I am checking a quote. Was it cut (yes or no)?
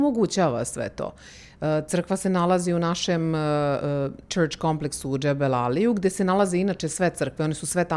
no